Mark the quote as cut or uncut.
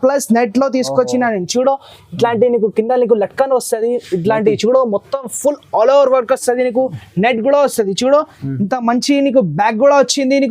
uncut